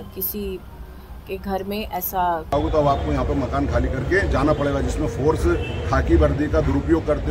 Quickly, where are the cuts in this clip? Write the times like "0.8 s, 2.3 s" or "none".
2.5 s